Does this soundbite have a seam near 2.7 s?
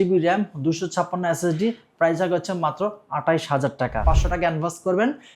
no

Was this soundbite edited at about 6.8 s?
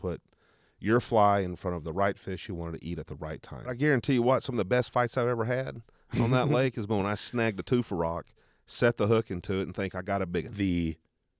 no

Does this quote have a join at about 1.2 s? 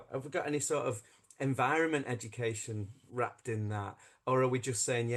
no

